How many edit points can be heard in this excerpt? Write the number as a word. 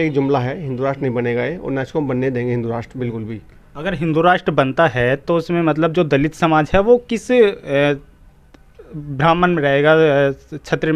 zero